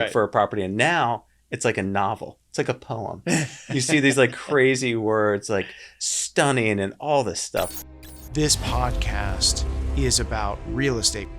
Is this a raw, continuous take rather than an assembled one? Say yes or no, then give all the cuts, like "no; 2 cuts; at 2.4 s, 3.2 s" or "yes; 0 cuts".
no; 1 cut; at 7.7 s